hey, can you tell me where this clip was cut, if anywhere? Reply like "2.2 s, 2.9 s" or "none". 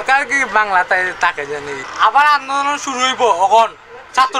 1.8 s